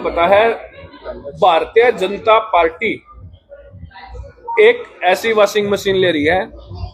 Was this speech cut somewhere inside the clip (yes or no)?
no